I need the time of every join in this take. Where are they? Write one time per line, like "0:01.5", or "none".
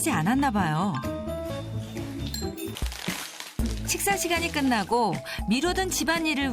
0:02.8

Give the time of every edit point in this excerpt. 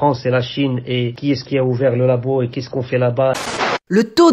0:01.1
0:02.6
0:03.4

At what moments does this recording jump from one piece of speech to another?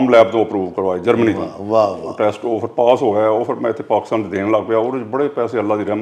none

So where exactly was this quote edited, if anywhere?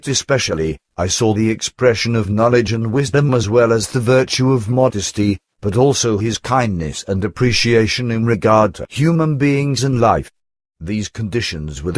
0:03.9

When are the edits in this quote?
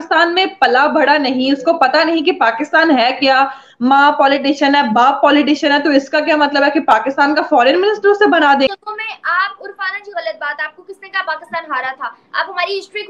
0:08.7

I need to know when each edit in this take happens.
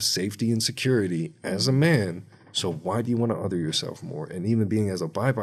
none

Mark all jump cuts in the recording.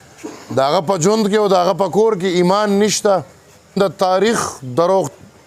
0:03.8

